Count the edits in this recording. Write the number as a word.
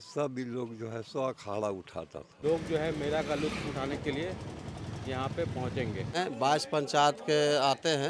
two